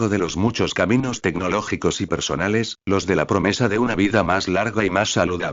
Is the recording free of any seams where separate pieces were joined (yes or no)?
yes